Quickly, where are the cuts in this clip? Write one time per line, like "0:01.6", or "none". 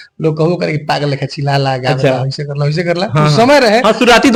none